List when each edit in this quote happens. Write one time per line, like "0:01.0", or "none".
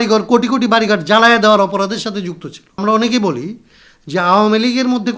0:02.8